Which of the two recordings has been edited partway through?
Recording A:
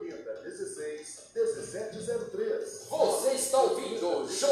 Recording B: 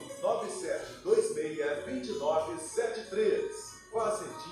A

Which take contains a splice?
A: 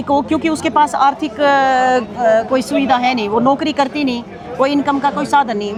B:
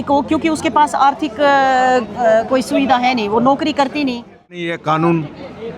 B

